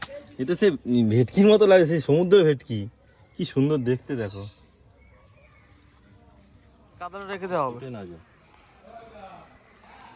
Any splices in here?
yes; 1 cut; at 7.2 s

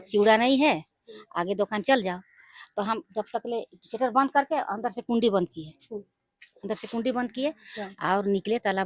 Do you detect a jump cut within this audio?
no; 0 cuts

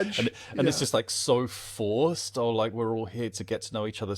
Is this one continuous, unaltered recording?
yes; 0 cuts

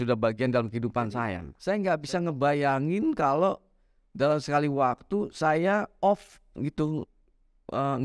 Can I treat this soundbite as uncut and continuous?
no; 1 cut; at 1.5 s

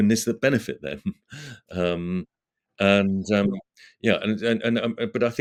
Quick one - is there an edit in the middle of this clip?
no; 0 cuts

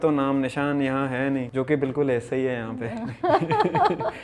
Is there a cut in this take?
yes; 1 cut; at 1.5 s

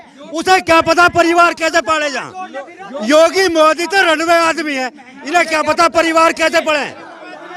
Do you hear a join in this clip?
no; 0 cuts

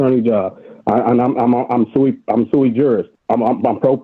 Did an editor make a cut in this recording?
yes; 1 cut; at 3.1 s

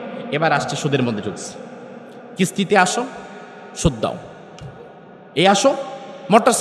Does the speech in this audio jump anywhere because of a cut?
no; 0 cuts

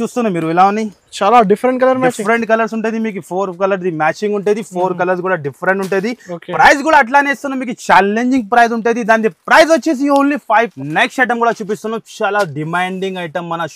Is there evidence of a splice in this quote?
yes; 1 cut; at 10.7 s

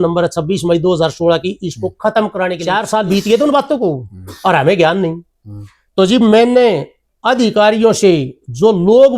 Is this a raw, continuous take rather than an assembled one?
no; 1 cut; at 2.6 s

